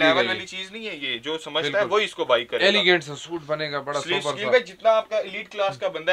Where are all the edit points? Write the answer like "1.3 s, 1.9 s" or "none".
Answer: none